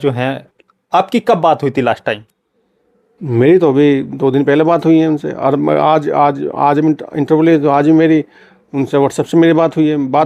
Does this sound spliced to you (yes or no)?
no